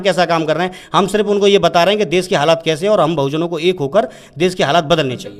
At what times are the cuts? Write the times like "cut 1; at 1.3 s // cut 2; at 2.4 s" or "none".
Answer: none